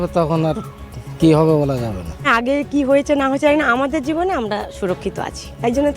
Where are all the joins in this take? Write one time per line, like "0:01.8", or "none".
0:02.3